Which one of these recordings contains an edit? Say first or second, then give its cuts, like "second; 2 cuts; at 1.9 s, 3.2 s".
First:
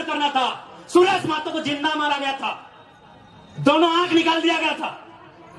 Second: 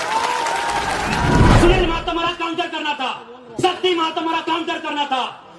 second; 1 cut; at 1.5 s